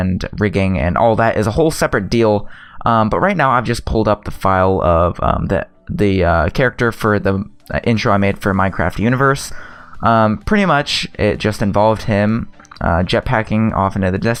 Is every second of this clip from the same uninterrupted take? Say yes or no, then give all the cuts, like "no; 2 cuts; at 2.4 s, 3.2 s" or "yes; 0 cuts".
yes; 0 cuts